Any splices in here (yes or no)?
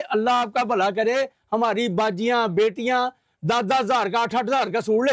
no